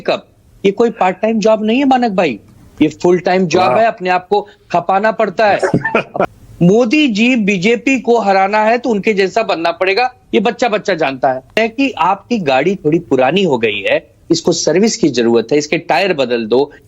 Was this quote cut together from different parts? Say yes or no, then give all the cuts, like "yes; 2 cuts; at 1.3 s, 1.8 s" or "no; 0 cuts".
yes; 2 cuts; at 6.3 s, 11.6 s